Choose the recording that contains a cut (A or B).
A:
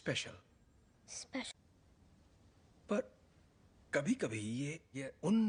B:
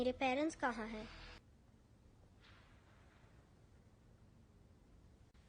B